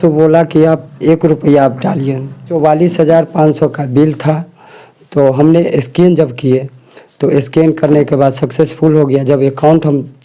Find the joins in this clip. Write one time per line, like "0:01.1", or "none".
0:00.9
0:02.5